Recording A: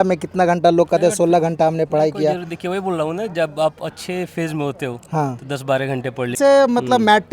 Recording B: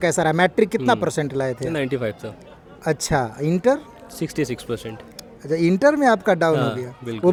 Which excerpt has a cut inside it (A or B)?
A